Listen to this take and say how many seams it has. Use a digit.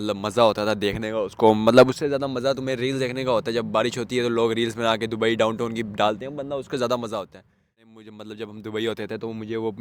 1